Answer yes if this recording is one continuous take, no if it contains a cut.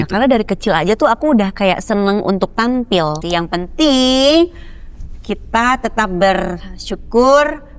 no